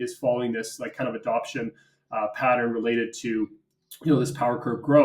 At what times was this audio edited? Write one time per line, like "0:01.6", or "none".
none